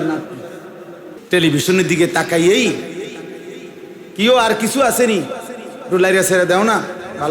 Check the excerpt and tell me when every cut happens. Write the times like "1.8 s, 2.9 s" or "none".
1.2 s